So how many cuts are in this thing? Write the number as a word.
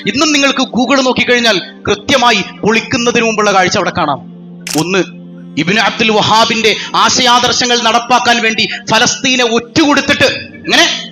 one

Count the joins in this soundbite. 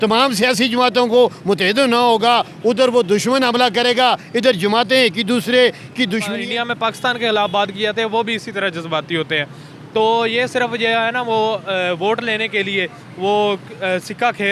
one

